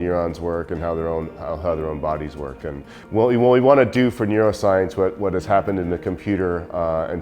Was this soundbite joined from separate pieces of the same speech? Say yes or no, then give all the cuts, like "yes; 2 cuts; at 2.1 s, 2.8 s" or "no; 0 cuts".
yes; 1 cut; at 3.0 s